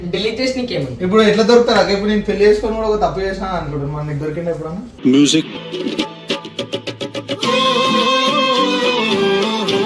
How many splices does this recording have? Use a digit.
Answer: 0